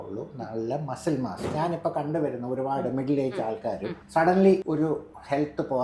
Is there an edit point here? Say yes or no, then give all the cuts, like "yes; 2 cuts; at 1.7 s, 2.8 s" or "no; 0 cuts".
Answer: yes; 3 cuts; at 1.5 s, 3.9 s, 4.6 s